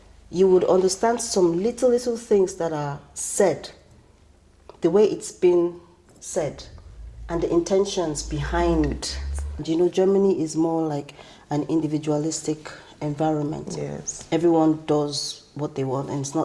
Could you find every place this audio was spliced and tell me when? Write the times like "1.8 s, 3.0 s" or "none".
9.6 s

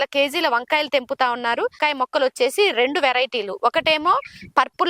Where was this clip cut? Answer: 1.8 s

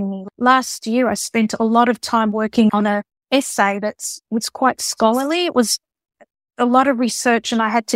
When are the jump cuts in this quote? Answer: 2.7 s

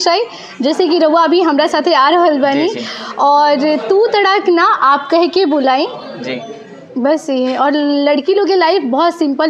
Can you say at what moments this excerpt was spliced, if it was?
none

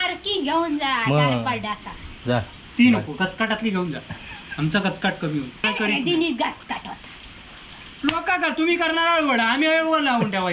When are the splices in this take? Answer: 5.7 s

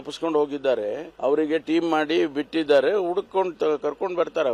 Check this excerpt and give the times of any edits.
1.0 s

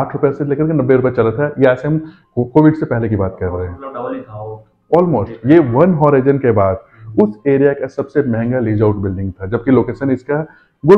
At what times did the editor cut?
none

